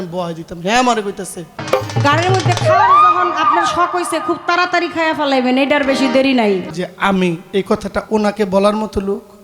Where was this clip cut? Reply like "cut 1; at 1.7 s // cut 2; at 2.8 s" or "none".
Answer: cut 1; at 1.6 s // cut 2; at 6.7 s